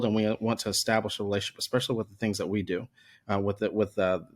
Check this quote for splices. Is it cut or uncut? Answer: uncut